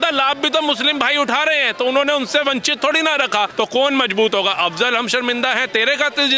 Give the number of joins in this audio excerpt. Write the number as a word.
one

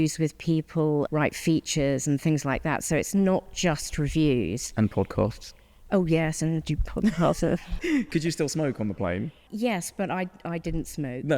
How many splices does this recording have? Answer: three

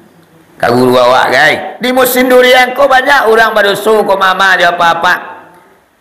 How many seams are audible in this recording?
one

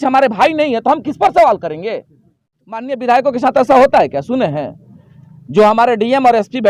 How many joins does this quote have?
one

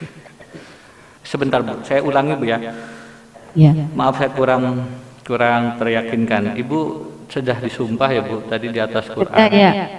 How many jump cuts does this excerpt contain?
one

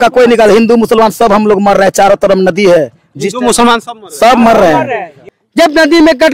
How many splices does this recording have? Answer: one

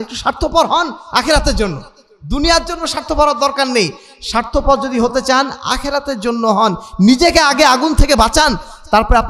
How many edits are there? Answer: zero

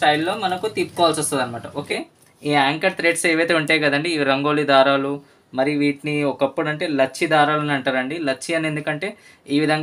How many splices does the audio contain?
one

